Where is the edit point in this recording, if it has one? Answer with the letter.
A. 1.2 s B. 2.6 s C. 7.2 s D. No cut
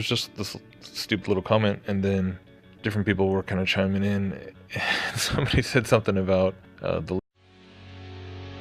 D